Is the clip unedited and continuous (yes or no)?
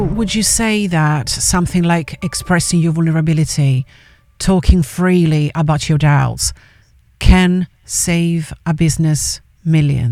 yes